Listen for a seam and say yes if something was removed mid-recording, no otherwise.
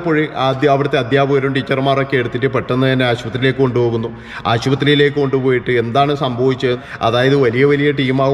yes